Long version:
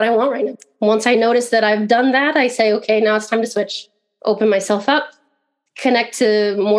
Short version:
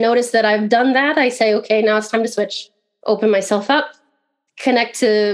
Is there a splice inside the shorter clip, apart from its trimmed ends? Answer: no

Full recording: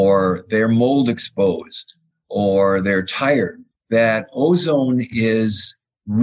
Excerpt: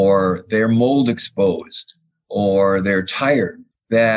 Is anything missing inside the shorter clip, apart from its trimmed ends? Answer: no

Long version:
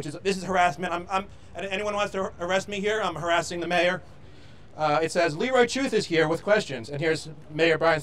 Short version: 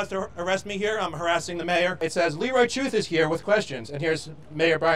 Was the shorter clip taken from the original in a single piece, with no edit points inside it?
no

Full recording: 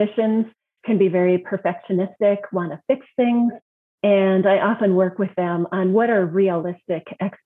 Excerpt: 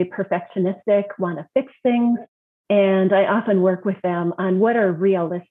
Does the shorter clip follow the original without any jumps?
yes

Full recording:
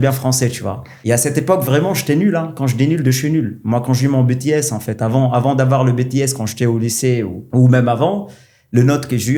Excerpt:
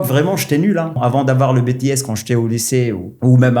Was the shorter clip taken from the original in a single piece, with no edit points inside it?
no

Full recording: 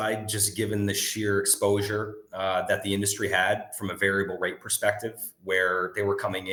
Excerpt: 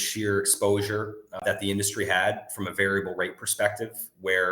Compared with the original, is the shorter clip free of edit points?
no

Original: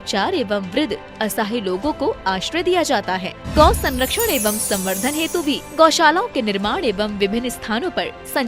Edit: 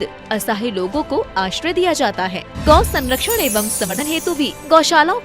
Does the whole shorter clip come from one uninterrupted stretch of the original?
no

